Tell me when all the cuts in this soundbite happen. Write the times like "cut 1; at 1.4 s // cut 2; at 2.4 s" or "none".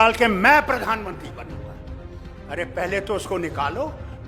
none

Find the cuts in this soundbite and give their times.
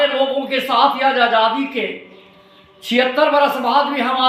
none

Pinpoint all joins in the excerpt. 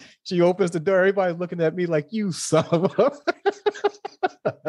none

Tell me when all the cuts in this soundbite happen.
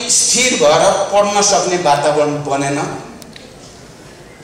none

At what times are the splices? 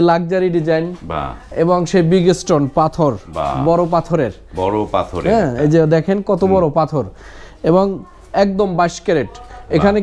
none

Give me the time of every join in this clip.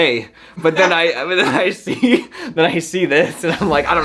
none

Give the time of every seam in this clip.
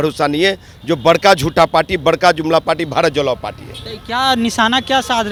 none

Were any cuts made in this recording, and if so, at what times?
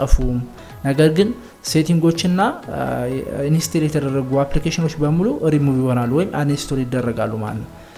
none

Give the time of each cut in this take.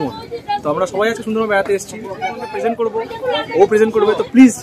cut 1; at 2.5 s

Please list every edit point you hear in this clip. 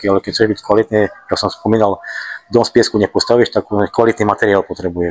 none

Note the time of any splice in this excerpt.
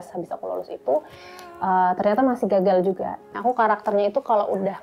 cut 1; at 3.3 s

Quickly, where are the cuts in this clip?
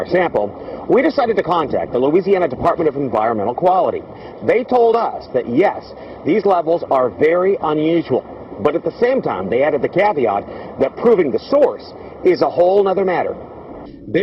cut 1; at 2.0 s

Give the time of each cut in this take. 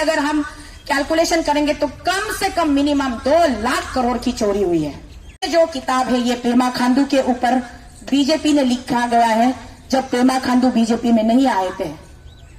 cut 1; at 5.5 s

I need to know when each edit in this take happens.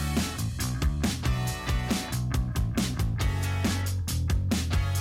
cut 1; at 2.4 s

